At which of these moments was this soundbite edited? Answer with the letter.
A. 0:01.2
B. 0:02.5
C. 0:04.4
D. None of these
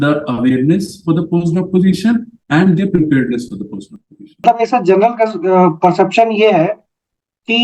C